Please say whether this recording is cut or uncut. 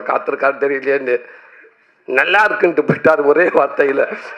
uncut